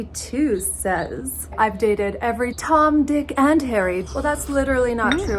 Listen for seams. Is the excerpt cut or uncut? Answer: cut